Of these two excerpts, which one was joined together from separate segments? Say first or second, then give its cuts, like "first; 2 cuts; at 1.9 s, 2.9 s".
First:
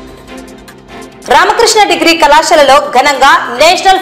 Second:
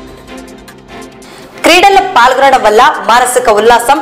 second; 1 cut; at 1.2 s